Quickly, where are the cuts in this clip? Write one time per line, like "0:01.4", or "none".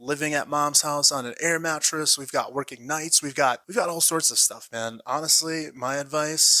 0:03.6